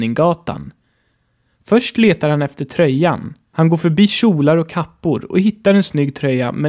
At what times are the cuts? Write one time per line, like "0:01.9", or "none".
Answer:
0:00.9
0:03.4